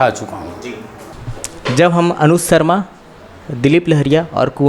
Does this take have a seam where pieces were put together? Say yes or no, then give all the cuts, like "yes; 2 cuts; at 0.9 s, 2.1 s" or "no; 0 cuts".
yes; 1 cut; at 1.1 s